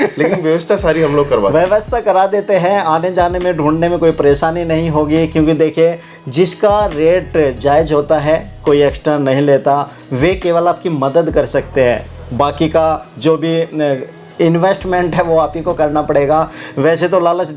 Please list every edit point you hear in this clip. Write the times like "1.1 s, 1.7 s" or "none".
none